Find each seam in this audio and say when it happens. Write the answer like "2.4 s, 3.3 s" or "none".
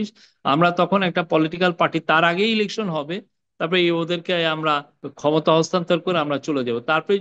5.0 s